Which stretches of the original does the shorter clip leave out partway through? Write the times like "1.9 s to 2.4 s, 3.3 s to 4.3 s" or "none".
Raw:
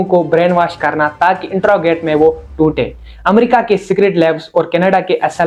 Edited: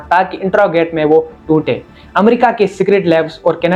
none